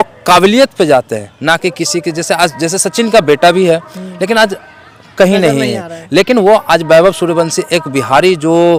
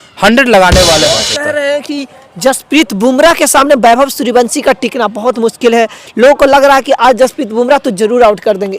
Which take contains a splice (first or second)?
second